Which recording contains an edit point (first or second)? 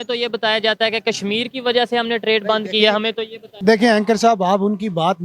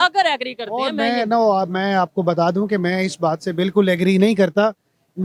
first